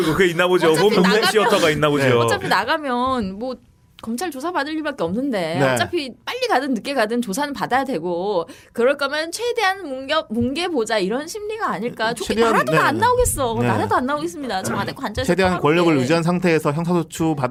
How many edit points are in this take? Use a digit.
0